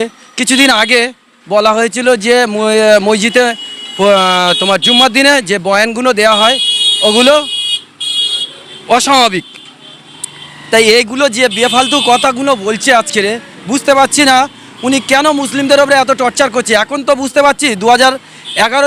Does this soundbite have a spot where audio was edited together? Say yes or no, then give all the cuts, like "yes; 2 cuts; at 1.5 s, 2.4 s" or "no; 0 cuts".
no; 0 cuts